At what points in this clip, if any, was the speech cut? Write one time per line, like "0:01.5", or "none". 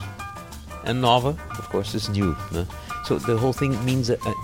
0:03.2